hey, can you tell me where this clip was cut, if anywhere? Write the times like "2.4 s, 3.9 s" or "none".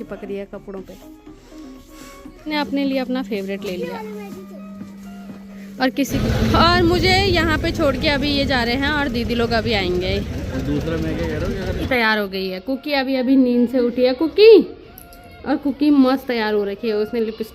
2.5 s, 6.1 s, 11.9 s